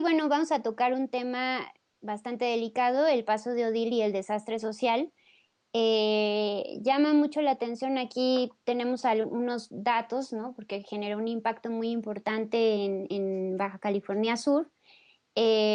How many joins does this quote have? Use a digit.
0